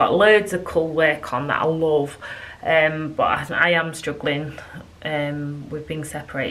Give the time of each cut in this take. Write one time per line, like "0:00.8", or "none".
none